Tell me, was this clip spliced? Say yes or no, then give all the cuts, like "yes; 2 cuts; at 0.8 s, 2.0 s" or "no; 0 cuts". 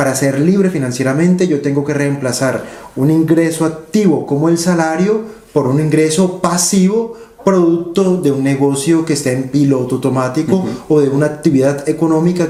no; 0 cuts